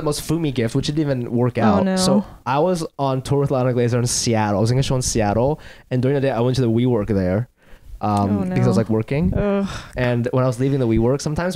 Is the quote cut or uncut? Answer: uncut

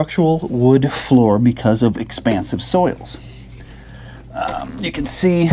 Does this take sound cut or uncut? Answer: uncut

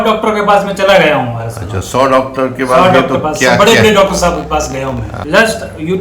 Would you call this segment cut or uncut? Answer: cut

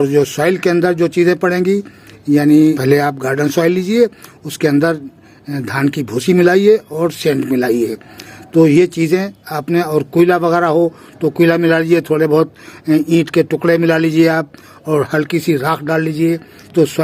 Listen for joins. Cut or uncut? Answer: uncut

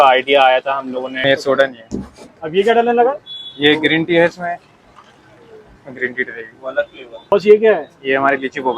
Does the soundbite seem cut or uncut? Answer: cut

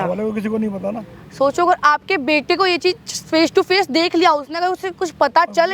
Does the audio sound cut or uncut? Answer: uncut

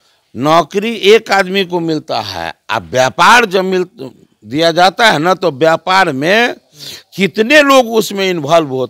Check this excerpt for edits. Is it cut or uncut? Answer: uncut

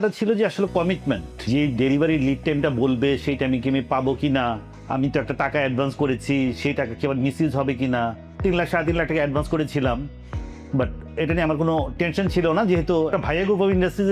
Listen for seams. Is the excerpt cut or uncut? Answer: cut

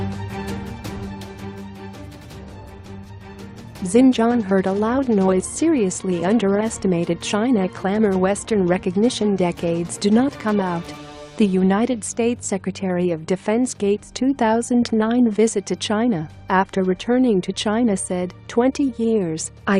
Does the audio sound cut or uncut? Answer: cut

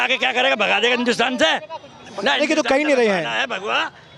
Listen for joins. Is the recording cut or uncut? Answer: uncut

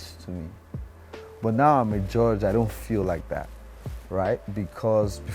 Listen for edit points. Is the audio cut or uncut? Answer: uncut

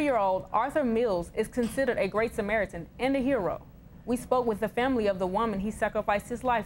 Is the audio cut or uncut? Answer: uncut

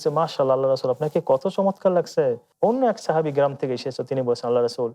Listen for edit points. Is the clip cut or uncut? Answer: cut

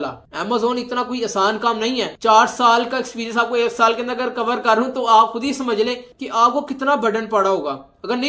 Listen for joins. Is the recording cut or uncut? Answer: uncut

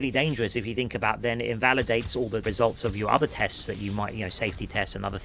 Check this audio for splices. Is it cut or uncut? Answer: cut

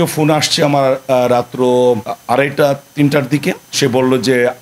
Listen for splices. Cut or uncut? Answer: uncut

